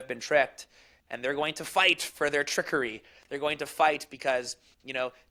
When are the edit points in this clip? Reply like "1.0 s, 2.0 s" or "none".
none

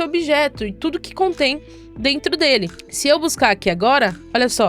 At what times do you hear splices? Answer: 2.8 s

